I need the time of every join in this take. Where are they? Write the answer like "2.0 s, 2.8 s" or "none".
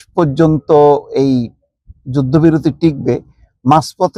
none